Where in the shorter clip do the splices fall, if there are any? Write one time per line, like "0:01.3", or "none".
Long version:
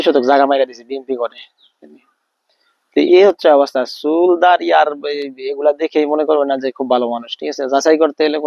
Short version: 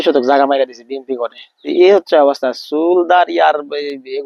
0:01.7